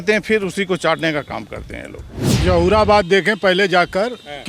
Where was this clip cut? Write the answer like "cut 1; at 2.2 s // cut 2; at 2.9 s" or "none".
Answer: cut 1; at 2.2 s